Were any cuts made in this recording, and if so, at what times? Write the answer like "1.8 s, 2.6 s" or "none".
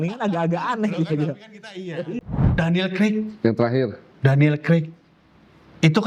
2.2 s